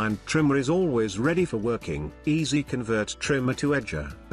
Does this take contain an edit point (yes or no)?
no